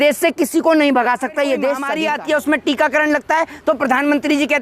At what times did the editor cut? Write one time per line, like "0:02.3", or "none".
0:01.9